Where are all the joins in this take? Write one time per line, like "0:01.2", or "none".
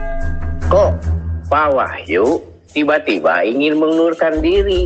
none